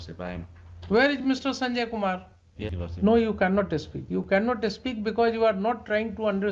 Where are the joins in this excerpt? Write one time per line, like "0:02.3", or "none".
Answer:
0:02.5